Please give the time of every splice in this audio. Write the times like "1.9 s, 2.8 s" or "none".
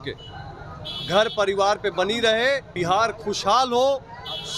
2.7 s

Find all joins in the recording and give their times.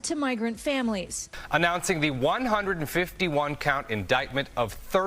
1.2 s

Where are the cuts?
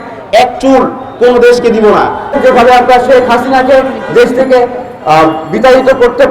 2.3 s

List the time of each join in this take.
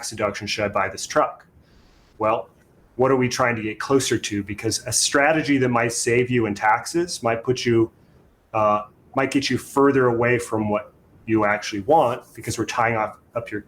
none

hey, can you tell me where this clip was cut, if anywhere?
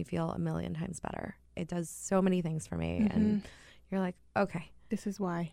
1.5 s

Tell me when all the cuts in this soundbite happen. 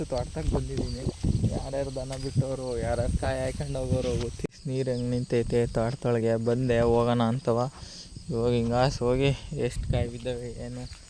4.4 s

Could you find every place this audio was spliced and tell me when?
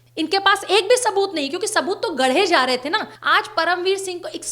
3.1 s

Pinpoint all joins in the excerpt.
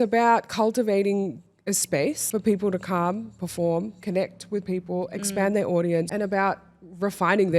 2.2 s, 6.1 s

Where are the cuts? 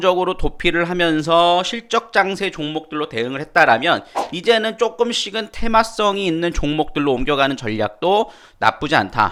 none

